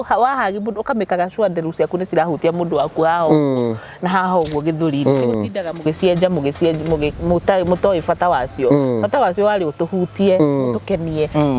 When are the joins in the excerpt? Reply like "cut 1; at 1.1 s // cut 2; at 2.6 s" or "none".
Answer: none